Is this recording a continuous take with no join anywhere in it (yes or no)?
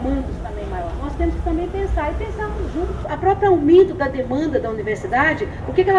no